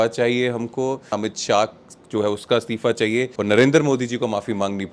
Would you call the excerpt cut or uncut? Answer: cut